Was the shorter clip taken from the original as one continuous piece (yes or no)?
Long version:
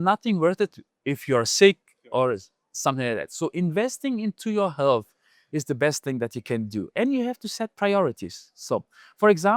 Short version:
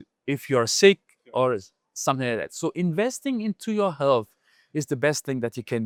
yes